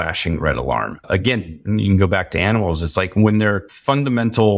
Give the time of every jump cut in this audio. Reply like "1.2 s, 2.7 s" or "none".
1.0 s, 3.7 s